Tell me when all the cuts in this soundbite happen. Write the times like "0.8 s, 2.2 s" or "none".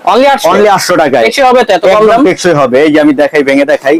none